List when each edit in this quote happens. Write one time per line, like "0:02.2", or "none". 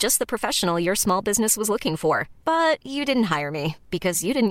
none